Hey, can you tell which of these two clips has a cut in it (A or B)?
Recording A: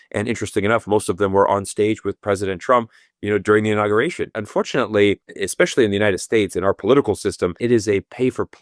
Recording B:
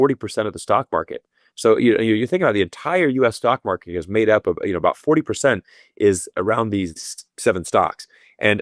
A